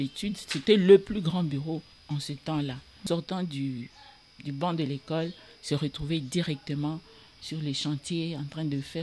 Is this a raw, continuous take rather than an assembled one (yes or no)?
no